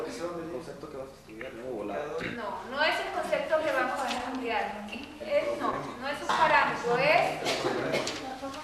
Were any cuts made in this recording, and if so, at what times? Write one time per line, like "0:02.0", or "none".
0:01.8